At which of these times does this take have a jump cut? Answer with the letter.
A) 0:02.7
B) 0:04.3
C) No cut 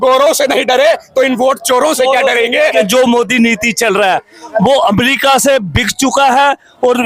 A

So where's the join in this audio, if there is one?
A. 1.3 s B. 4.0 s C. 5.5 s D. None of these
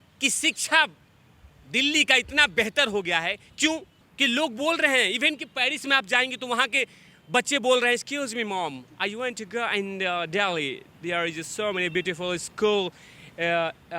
B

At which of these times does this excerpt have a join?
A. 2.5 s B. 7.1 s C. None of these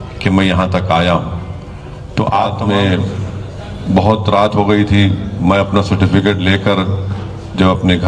A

